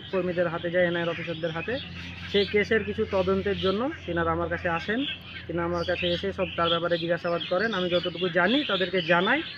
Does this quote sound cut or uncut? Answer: uncut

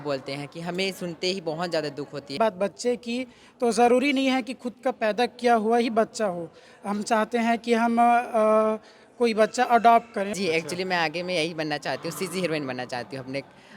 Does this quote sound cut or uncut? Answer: cut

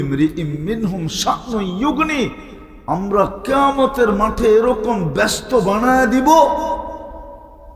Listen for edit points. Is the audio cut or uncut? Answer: uncut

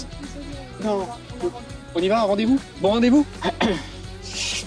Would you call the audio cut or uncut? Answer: uncut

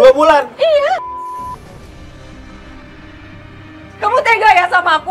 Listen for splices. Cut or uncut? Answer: cut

